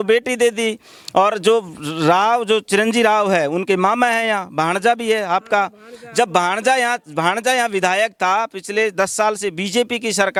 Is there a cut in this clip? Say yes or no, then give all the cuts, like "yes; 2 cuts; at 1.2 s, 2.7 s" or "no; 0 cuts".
no; 0 cuts